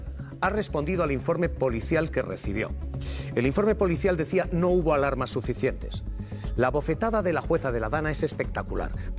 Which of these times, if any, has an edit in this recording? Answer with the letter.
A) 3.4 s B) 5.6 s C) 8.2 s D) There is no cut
D